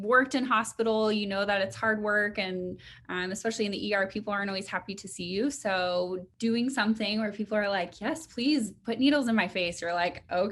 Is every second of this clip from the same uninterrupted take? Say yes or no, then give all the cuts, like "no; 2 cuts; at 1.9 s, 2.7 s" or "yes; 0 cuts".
no; 1 cut; at 6.3 s